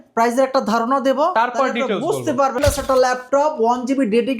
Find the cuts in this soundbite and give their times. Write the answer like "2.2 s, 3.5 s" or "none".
2.6 s